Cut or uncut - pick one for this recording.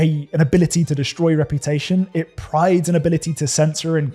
uncut